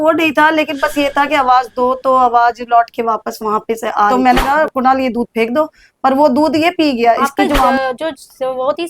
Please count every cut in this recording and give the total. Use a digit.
2